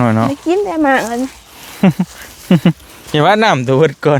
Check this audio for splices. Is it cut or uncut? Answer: uncut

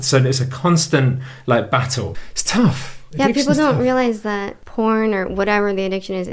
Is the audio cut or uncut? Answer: cut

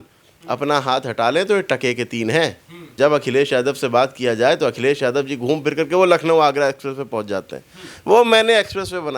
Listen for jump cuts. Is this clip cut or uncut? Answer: cut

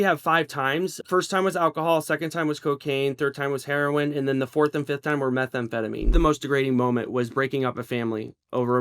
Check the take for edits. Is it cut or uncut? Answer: cut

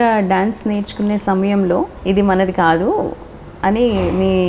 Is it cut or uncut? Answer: cut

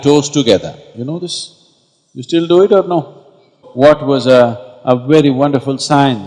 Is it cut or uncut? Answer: cut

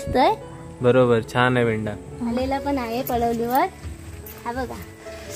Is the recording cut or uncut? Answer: cut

